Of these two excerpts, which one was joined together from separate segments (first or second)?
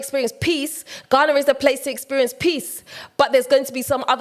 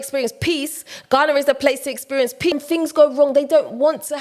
second